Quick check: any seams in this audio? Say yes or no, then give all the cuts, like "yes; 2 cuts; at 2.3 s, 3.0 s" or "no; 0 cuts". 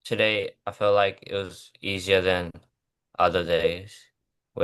no; 0 cuts